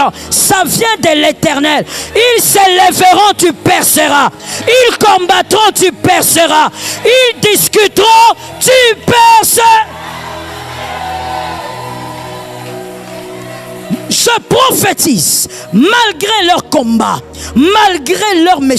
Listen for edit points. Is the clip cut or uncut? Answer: uncut